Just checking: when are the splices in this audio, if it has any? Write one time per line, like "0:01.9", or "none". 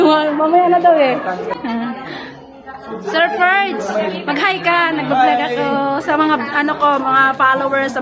0:01.6